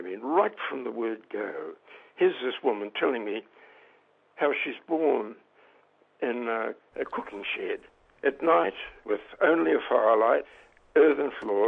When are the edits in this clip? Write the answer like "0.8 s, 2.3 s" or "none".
6.8 s, 8.9 s, 10.4 s